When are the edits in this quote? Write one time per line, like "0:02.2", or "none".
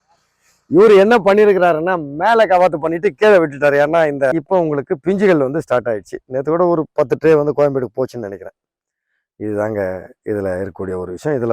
0:04.3